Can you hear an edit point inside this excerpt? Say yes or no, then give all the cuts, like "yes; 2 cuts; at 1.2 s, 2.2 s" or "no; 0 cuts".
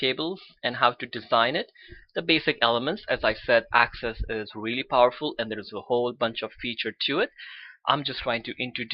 yes; 1 cut; at 4.8 s